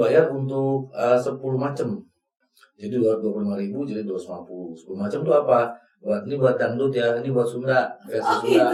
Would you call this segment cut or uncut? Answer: uncut